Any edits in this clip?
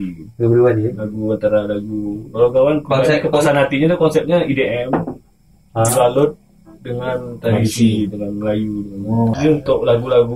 yes; 1 cut; at 9.3 s

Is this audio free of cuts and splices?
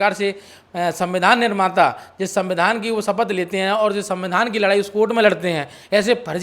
yes; 0 cuts

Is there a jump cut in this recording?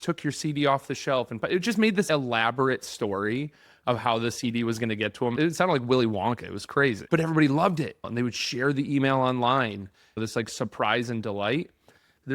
yes; 4 cuts; at 5.3 s, 7.0 s, 8.1 s, 10.1 s

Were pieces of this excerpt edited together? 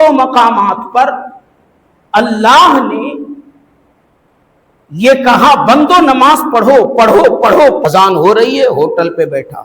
yes; 1 cut; at 7.8 s

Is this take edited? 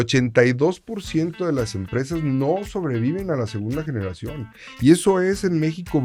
no; 0 cuts

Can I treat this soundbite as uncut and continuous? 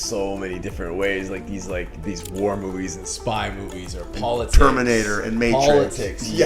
yes; 0 cuts

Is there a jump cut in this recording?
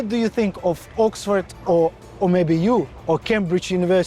no; 0 cuts

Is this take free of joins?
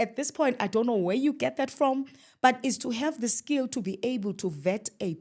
yes; 0 cuts

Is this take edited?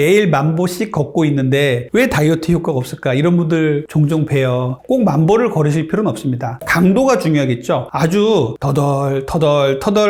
no; 0 cuts

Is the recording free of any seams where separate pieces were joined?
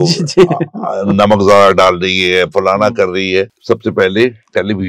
no; 1 cut; at 3.6 s

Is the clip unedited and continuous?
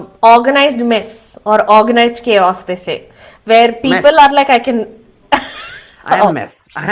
yes; 0 cuts

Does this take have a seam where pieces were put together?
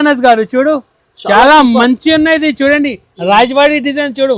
no; 0 cuts

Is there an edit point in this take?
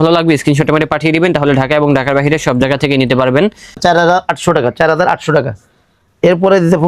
yes; 1 cut; at 3.8 s

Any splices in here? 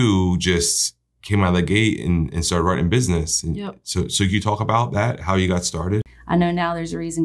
yes; 1 cut; at 6.1 s

